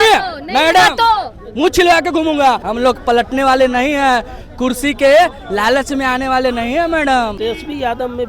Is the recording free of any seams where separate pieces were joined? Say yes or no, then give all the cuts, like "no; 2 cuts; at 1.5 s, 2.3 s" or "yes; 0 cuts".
no; 2 cuts; at 2.7 s, 7.3 s